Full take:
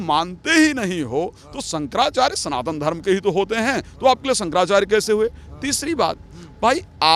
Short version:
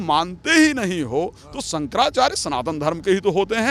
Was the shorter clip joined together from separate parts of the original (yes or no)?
no